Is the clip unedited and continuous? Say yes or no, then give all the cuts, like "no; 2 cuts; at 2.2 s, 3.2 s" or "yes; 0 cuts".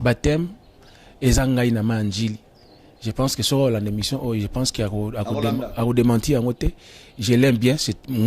yes; 0 cuts